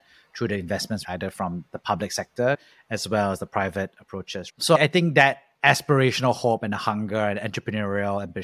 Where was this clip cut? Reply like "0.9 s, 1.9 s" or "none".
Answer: 1.1 s, 2.6 s